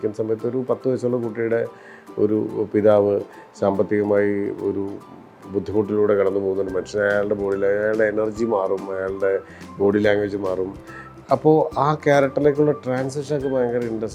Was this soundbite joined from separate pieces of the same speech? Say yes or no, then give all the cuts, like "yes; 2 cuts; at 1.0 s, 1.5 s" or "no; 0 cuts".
no; 0 cuts